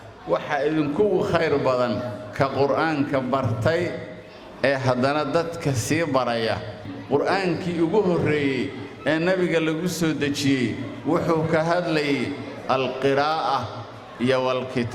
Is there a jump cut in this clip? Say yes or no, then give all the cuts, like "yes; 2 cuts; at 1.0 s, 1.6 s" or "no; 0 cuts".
yes; 1 cut; at 6.9 s